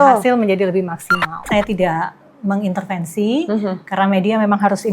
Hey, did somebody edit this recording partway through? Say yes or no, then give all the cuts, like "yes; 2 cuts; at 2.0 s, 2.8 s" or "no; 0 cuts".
yes; 1 cut; at 1.5 s